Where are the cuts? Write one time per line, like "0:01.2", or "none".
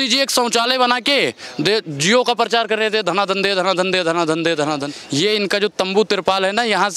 0:05.0